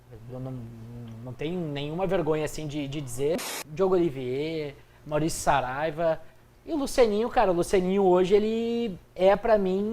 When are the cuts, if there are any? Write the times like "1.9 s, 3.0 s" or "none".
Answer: 3.6 s